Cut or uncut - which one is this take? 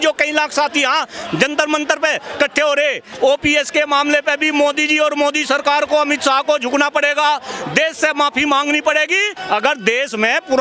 cut